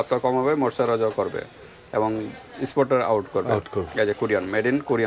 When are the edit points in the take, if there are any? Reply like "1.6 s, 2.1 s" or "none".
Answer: none

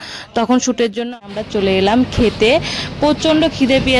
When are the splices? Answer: 1.2 s

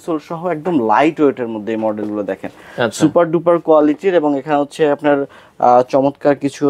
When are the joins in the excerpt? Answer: none

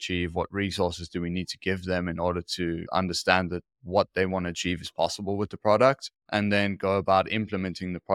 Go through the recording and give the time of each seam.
2.8 s

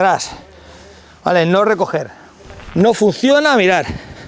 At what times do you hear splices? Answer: 2.6 s

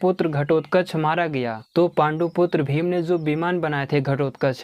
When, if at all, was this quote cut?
1.6 s

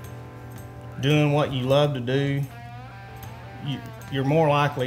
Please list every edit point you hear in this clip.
none

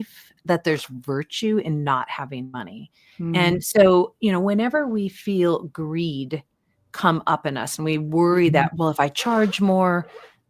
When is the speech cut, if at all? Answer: none

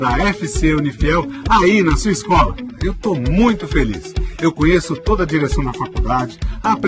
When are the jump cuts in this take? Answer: none

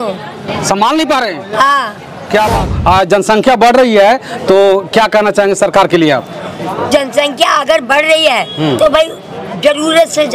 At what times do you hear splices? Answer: 2.5 s

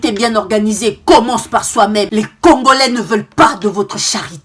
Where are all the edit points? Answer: 2.1 s

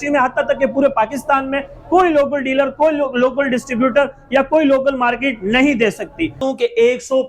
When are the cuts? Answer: 6.4 s

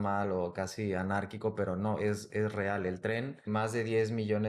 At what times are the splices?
3.5 s

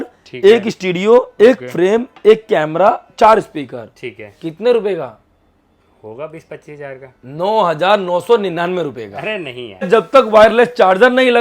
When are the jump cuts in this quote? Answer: 9.9 s

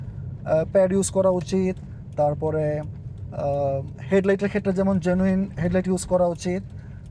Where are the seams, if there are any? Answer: none

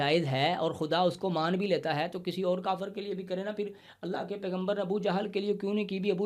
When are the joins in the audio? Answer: none

